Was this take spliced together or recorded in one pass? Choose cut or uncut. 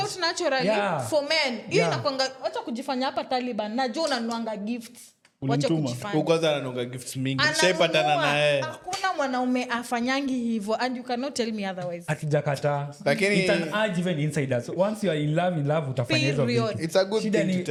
uncut